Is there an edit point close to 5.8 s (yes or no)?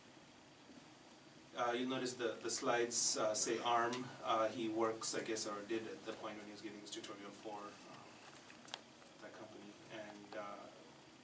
yes